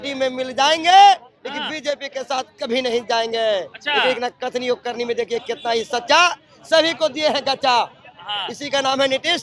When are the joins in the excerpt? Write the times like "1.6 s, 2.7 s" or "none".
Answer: none